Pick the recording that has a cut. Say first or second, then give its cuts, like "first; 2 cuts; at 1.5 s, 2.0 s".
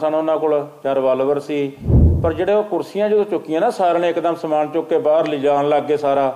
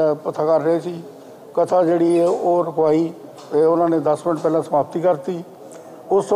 first; 1 cut; at 2.0 s